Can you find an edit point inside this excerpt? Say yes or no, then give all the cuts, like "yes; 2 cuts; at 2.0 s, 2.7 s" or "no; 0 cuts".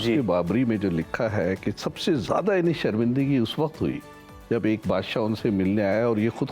no; 0 cuts